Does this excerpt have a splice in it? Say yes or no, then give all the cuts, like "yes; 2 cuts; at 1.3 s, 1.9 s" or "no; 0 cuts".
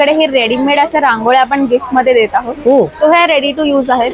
no; 0 cuts